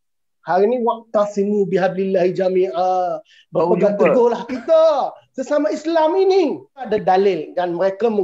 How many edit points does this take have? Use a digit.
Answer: 1